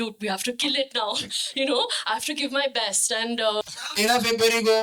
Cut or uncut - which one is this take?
cut